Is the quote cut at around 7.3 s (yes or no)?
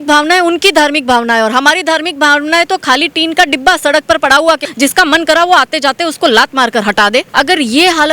yes